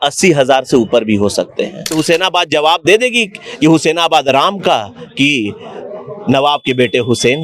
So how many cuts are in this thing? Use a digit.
1